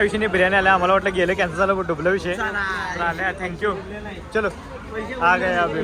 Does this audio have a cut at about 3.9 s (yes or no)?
no